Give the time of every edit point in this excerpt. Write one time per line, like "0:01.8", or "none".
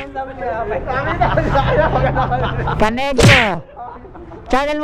none